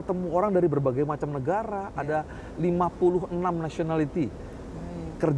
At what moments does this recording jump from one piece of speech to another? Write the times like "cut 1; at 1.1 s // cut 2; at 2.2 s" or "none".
none